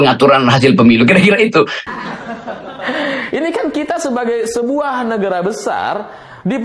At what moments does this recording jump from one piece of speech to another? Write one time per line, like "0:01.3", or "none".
0:01.8